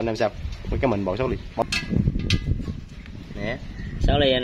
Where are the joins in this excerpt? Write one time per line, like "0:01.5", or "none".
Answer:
0:01.6